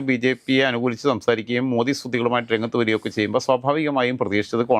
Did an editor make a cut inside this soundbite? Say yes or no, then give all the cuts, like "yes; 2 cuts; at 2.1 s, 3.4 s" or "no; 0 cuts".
no; 0 cuts